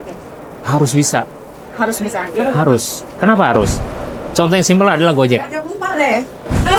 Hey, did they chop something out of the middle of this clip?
no; 0 cuts

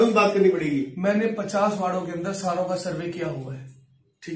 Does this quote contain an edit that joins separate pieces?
no; 0 cuts

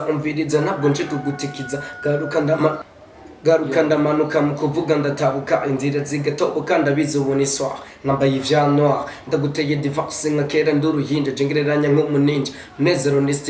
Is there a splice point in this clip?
yes; 1 cut; at 2.9 s

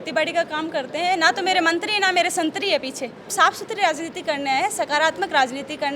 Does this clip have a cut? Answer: yes; 1 cut; at 3.3 s

